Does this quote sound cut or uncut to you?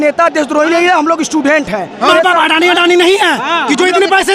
cut